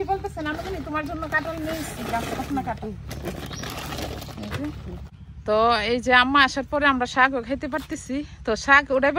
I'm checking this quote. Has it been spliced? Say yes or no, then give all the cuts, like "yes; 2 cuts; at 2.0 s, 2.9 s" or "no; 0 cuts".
yes; 1 cut; at 5.1 s